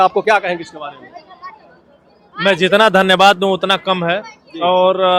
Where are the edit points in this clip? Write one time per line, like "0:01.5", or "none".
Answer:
none